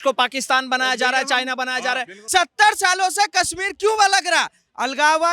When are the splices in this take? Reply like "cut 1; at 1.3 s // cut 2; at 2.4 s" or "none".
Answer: cut 1; at 2.2 s